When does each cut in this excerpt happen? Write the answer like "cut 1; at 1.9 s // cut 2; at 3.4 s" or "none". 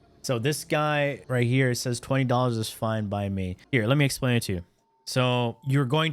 cut 1; at 1.2 s // cut 2; at 3.6 s